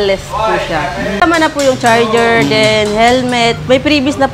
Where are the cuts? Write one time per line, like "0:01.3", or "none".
0:01.2